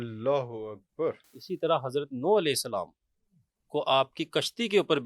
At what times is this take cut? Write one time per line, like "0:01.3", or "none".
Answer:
0:01.3